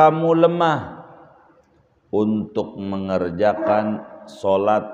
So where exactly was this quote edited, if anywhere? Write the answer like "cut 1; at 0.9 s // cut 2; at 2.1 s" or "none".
none